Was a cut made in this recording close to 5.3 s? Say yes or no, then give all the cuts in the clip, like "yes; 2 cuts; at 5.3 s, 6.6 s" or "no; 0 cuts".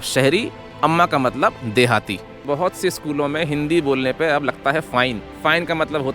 yes; 2 cuts; at 2.3 s, 5.3 s